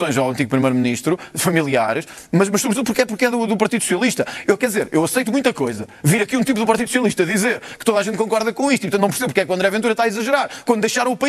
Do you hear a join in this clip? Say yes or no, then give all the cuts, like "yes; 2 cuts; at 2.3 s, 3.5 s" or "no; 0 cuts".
no; 0 cuts